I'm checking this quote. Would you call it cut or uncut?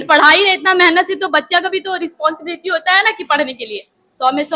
uncut